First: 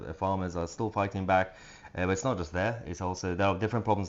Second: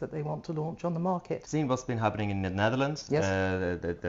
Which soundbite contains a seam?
second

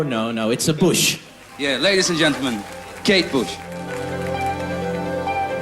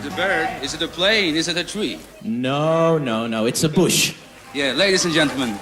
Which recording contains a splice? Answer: first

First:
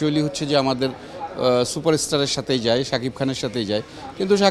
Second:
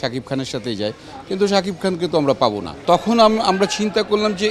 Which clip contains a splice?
second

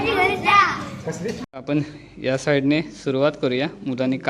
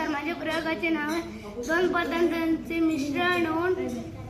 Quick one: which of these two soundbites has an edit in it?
first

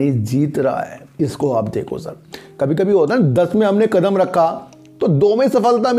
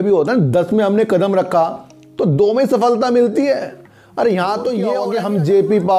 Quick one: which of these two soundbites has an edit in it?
second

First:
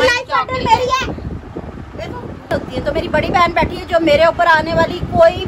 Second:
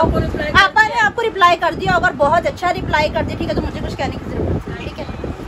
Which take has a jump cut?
first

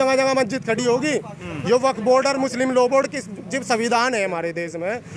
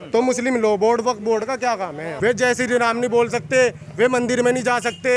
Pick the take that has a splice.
second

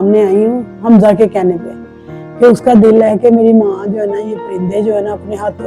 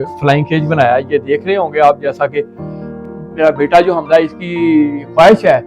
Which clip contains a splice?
second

